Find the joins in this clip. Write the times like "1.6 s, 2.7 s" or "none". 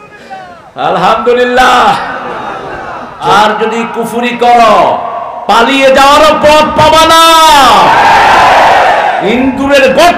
3.2 s